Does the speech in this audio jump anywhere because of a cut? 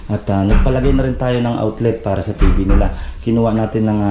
no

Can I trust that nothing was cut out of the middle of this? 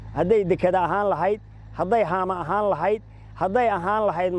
yes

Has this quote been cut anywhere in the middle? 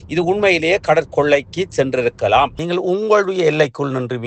yes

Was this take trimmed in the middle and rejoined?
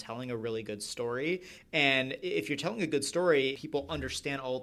yes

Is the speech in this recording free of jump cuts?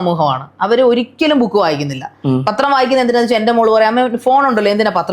yes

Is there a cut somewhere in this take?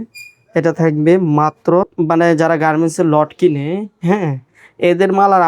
yes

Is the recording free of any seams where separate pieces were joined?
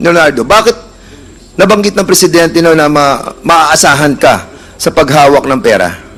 yes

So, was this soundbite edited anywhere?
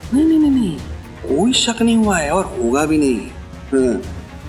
no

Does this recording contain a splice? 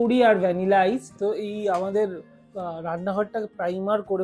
yes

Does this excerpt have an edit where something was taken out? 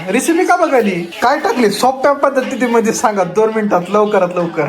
yes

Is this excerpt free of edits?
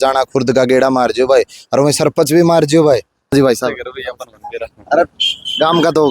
no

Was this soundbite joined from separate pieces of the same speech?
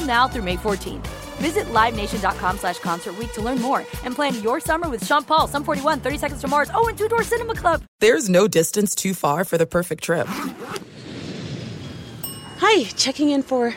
no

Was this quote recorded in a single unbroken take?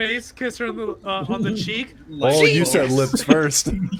yes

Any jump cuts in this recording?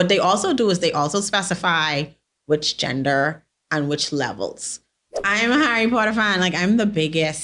yes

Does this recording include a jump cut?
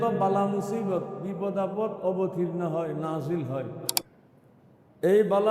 yes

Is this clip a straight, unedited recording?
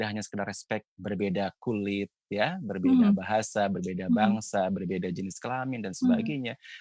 yes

